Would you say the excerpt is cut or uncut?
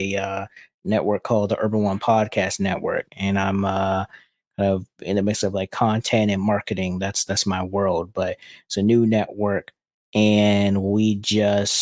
uncut